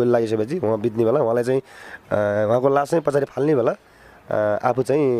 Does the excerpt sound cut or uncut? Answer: uncut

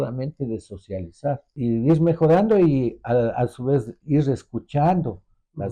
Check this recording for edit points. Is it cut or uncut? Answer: cut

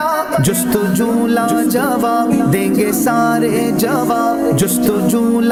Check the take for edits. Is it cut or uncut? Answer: uncut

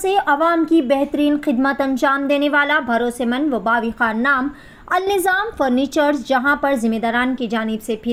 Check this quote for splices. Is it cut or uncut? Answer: uncut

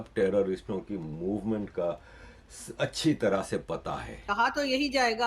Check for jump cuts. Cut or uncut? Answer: cut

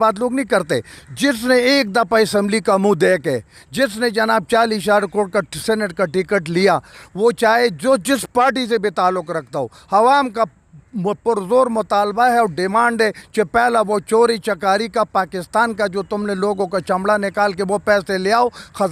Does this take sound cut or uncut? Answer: uncut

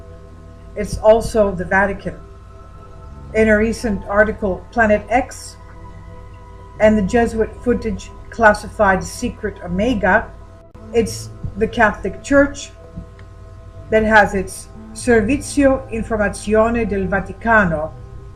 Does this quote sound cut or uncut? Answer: uncut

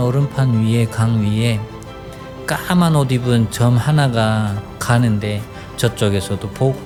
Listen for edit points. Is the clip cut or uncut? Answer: uncut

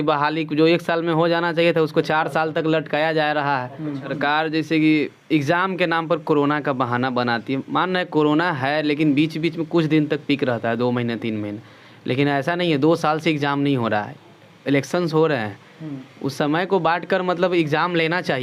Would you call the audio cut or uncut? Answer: cut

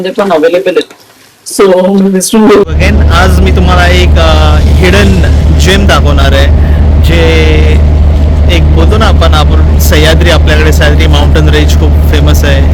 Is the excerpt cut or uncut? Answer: cut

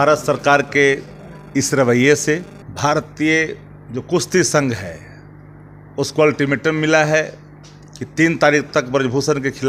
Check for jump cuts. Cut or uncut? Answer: cut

